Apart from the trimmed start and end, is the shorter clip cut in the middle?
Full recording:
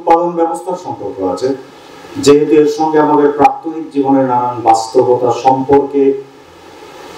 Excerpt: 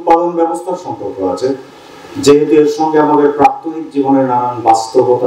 no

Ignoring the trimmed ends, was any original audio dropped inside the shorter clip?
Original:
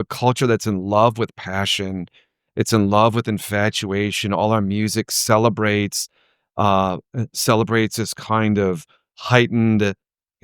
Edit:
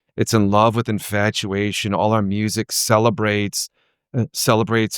yes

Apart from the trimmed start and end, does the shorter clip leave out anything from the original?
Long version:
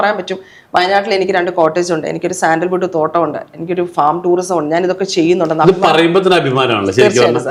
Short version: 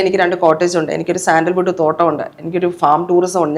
no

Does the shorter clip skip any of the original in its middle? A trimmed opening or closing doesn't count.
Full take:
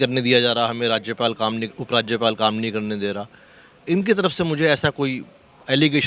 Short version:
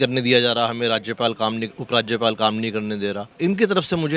yes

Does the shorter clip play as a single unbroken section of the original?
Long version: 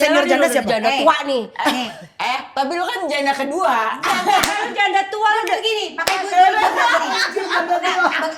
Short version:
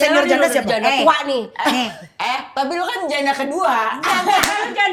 yes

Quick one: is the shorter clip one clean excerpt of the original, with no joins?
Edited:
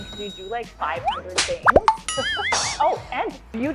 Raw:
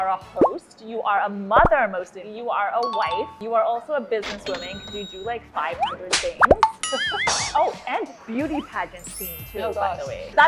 yes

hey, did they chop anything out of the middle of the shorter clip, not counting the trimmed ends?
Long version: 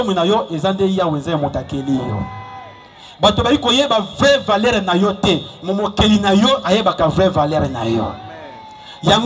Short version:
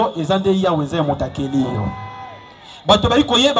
no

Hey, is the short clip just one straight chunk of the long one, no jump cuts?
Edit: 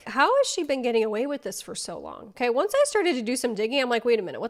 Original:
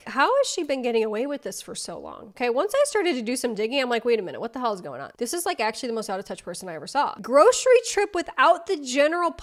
yes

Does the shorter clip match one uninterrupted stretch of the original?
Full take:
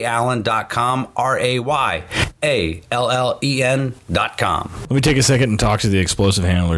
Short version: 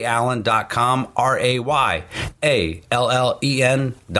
yes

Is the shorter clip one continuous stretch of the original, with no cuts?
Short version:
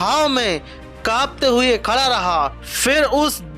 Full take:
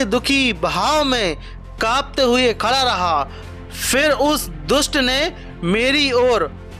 no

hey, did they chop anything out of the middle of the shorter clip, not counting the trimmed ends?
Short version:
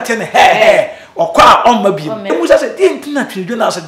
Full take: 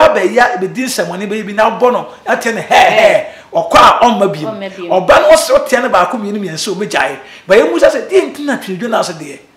yes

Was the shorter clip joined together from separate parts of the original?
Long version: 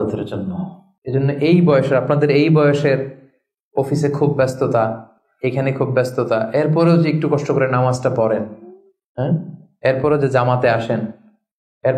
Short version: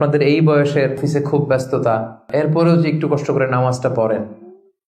yes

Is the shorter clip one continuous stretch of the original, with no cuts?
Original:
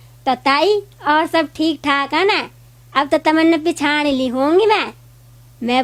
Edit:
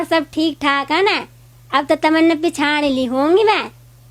yes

